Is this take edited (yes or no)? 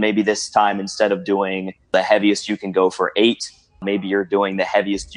yes